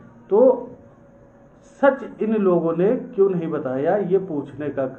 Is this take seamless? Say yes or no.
yes